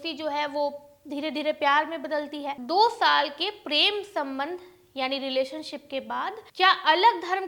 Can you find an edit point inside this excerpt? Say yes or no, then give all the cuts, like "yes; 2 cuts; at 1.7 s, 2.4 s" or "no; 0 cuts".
yes; 2 cuts; at 2.6 s, 6.4 s